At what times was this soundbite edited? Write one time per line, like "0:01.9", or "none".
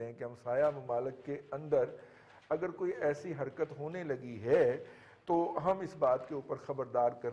none

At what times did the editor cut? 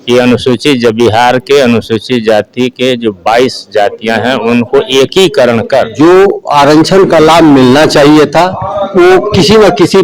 0:05.9
0:08.7

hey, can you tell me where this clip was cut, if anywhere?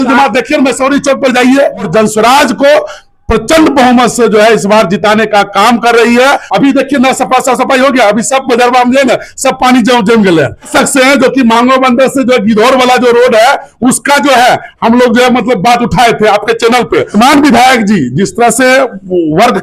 0:01.9
0:06.4
0:10.7
0:17.1

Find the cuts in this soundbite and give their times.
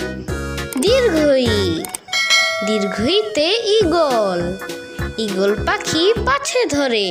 none

